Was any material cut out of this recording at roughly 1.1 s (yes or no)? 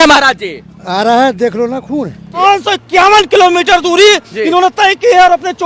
no